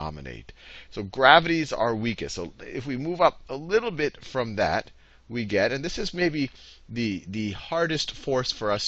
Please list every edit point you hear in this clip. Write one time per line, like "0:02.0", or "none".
none

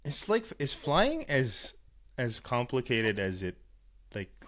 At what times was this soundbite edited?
none

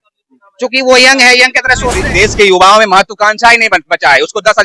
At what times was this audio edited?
0:02.0

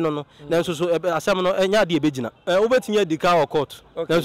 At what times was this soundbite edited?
0:02.3

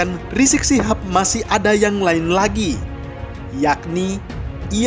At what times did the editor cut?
none

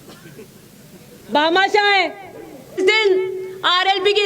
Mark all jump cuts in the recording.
0:02.8

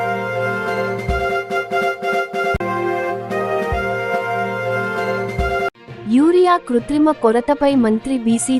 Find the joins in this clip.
0:01.4
0:02.6
0:05.7

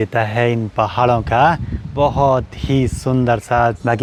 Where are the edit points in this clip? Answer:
none

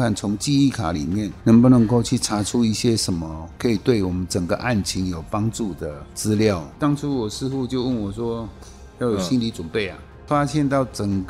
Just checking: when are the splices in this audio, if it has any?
0:06.7
0:10.2

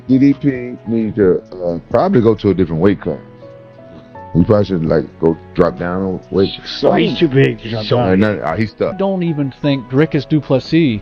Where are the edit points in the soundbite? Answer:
0:09.0

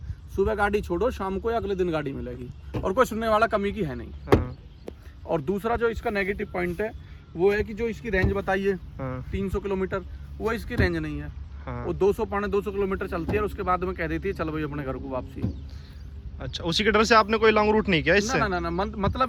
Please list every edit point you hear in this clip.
none

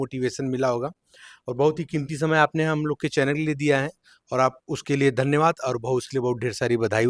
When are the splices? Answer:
none

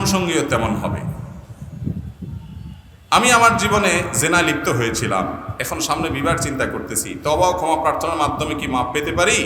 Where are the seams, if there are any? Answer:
none

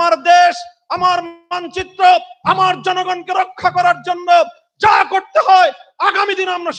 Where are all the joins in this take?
none

